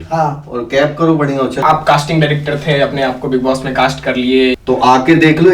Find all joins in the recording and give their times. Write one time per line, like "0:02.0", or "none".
0:01.6
0:04.6